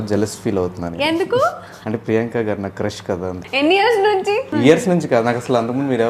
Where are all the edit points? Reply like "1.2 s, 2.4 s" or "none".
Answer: 1.7 s, 3.4 s, 4.5 s